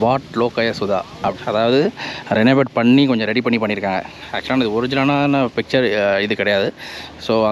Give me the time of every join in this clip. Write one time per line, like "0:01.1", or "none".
0:01.3